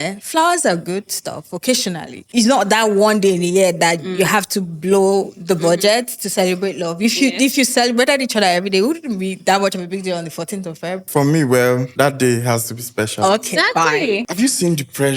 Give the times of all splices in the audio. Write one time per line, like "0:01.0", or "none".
0:02.1
0:11.0
0:11.9
0:14.2